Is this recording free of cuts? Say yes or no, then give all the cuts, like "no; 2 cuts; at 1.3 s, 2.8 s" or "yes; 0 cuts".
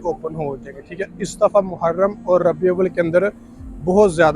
yes; 0 cuts